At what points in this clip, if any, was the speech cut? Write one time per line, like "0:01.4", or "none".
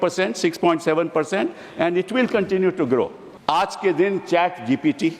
0:03.3